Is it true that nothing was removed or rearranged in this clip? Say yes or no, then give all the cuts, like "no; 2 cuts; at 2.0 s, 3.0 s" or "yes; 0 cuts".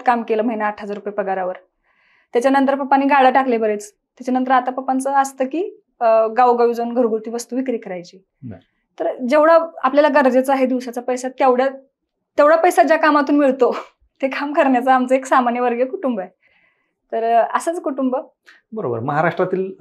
yes; 0 cuts